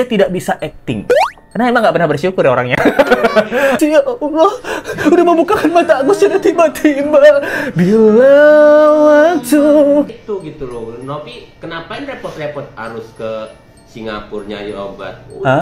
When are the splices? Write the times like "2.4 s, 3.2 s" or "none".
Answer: 3.8 s, 10.1 s

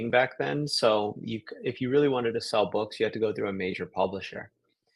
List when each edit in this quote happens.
none

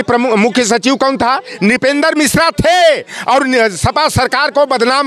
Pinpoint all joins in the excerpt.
none

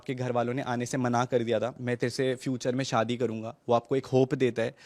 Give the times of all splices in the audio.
1.8 s

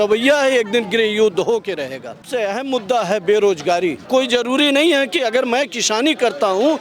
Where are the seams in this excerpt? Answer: 2.2 s, 4.1 s

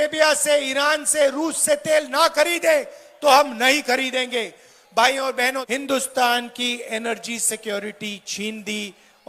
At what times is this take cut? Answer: 5.6 s

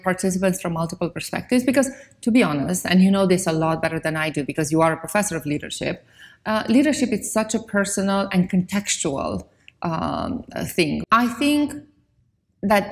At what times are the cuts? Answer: 11.0 s

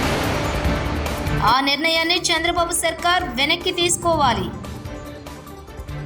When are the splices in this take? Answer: 1.4 s

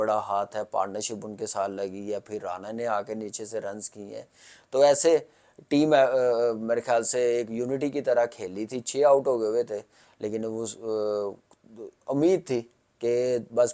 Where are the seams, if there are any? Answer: none

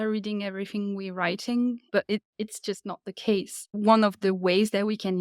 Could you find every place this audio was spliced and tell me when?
3.6 s

